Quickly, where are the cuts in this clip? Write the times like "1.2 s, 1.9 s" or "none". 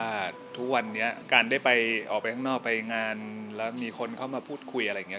1.2 s